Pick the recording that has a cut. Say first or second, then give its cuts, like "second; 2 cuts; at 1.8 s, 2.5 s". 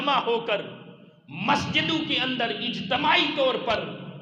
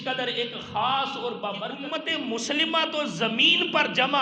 second; 1 cut; at 2.0 s